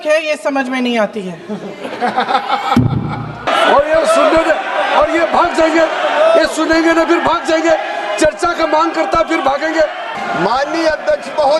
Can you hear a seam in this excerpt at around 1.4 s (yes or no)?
no